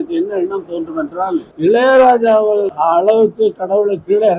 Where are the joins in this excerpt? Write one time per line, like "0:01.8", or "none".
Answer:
0:01.5
0:02.7